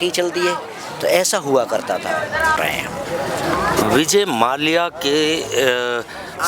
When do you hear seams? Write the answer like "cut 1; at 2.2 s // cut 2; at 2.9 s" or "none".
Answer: cut 1; at 2.6 s